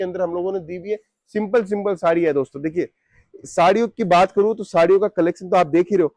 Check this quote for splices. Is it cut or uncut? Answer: uncut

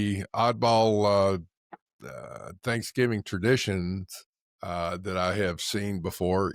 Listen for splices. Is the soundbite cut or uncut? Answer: uncut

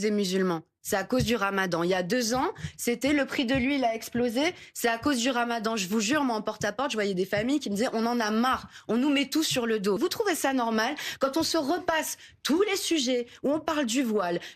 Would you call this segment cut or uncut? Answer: cut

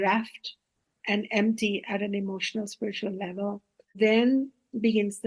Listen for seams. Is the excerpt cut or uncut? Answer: cut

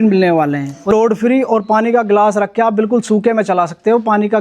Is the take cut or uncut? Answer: cut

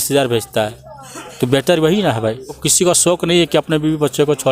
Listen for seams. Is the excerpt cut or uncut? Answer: cut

